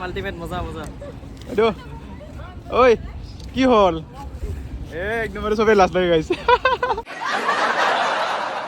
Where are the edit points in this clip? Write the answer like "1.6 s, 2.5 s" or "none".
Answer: 7.1 s